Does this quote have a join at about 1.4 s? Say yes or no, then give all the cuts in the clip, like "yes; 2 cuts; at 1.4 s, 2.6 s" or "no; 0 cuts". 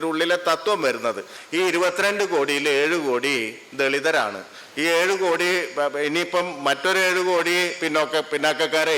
yes; 1 cut; at 1.4 s